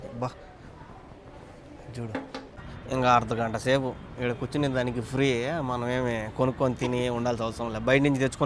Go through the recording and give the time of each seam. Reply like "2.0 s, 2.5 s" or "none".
2.6 s